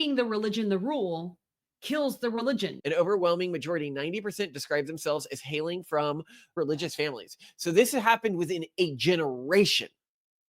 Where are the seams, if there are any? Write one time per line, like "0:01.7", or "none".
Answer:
0:02.8
0:06.5